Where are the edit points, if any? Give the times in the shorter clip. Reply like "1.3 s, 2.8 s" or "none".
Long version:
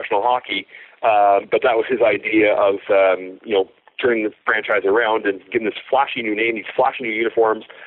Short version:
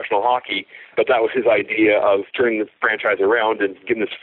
0.9 s, 2.3 s